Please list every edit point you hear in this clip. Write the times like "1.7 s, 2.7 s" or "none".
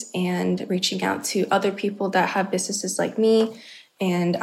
none